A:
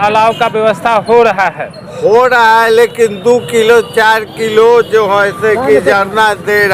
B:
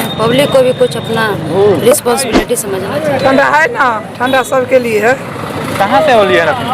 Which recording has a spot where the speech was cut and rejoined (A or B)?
B